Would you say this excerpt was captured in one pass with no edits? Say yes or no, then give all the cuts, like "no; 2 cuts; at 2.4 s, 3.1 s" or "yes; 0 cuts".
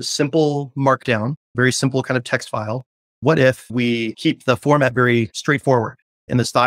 yes; 0 cuts